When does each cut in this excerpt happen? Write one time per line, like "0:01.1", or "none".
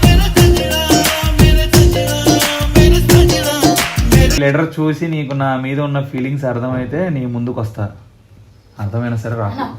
0:04.4